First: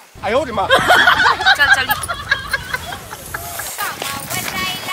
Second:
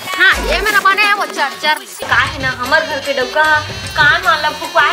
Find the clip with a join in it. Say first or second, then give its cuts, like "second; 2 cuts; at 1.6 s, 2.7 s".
second; 1 cut; at 2.1 s